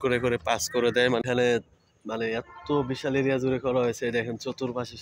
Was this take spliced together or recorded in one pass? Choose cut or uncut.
cut